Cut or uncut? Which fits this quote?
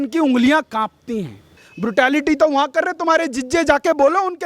cut